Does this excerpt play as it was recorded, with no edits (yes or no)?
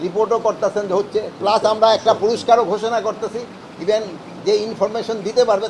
yes